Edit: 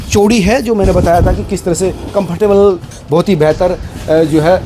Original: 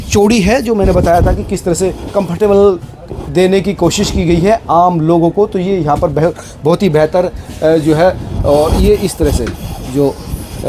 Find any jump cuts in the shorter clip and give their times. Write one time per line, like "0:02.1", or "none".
0:02.9